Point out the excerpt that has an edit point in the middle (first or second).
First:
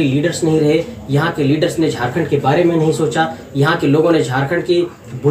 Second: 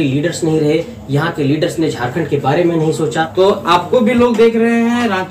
second